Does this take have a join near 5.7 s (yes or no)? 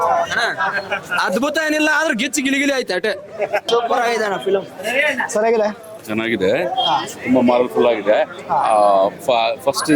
no